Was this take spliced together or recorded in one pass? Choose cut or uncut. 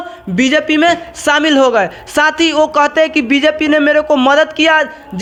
uncut